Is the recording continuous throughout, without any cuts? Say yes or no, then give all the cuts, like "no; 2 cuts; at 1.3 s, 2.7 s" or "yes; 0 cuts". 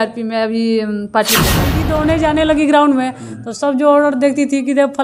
no; 1 cut; at 1.8 s